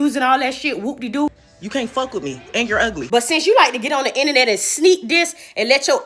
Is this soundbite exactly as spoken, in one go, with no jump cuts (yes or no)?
no